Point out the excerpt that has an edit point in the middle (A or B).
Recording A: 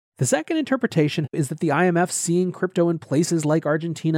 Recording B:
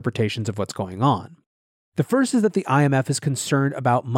A